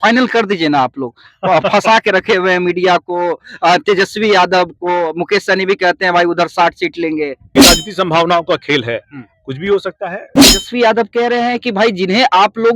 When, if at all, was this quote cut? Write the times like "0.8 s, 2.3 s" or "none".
7.4 s, 10.4 s